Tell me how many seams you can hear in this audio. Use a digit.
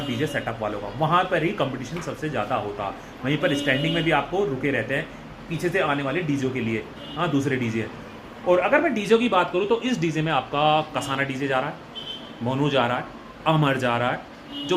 0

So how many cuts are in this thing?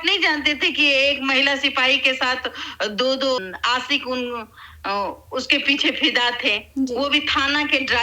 0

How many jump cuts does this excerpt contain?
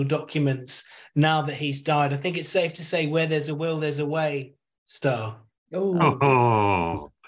0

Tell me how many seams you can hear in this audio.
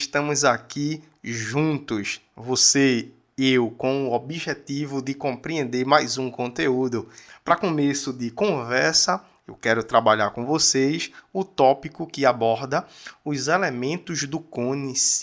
1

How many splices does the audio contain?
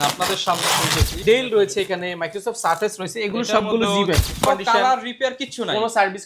2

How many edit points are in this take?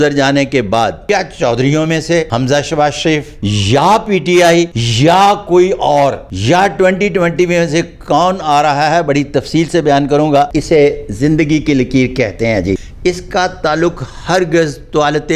7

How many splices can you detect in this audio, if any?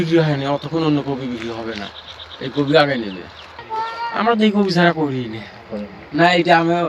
1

